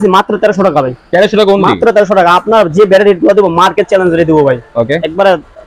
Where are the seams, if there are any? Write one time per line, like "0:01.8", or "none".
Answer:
none